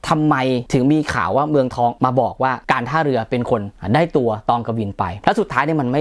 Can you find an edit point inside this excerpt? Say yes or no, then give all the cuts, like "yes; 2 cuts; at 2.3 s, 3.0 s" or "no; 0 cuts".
yes; 2 cuts; at 1.9 s, 5.1 s